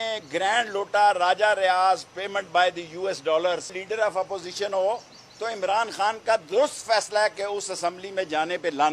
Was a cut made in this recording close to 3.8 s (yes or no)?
yes